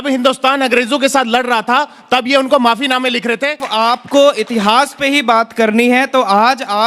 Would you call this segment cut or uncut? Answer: cut